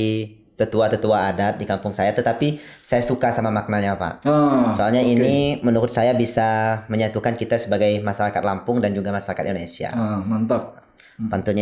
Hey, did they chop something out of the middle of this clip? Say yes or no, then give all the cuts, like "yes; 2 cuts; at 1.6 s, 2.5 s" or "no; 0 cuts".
no; 0 cuts